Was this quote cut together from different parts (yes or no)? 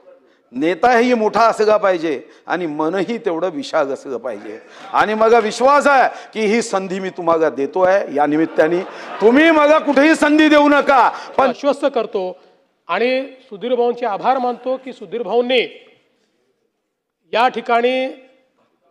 yes